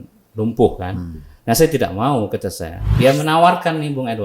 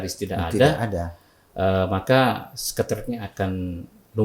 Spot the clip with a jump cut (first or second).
first